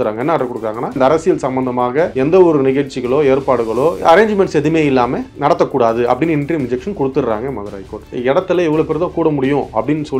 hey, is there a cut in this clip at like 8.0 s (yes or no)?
yes